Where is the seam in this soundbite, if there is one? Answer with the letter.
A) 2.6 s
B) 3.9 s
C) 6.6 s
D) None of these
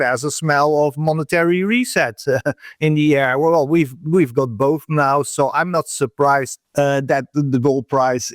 C